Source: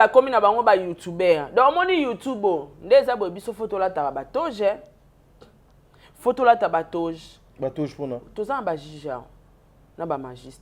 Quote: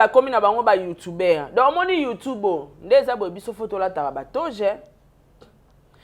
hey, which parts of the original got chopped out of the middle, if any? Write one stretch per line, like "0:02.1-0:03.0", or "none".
none